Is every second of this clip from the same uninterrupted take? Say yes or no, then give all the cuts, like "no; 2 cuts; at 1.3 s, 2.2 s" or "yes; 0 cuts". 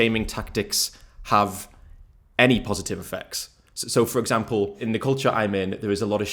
no; 1 cut; at 4.8 s